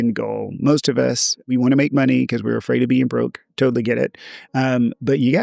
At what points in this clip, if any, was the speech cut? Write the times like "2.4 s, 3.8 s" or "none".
1.4 s